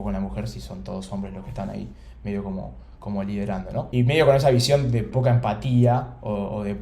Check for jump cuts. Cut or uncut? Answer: cut